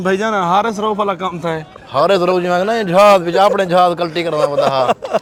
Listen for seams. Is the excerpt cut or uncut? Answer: uncut